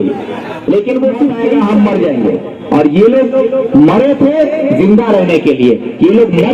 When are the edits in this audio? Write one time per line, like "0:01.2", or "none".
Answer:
0:01.5